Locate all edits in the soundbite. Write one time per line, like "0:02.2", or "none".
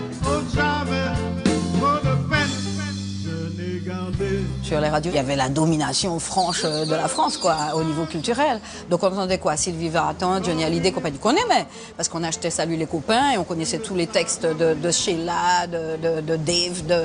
none